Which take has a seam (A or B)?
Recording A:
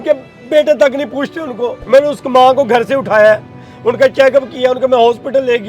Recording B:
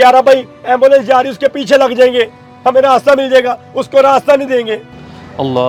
A